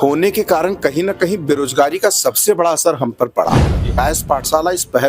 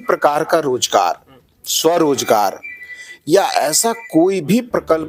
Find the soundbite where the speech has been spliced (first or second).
first